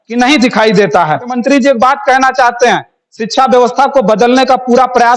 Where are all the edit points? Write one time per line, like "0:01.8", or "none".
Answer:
0:01.4